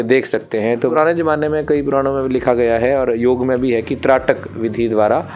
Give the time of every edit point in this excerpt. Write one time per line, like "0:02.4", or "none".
0:00.9